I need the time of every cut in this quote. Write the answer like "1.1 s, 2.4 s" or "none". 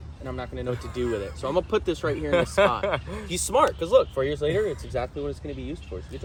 none